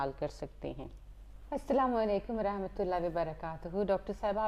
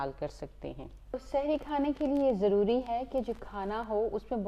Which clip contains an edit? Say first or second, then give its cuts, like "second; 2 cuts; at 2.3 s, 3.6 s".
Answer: second; 1 cut; at 1.2 s